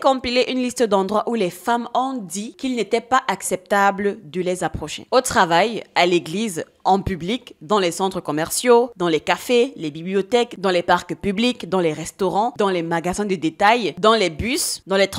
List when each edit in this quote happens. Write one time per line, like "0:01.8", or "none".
none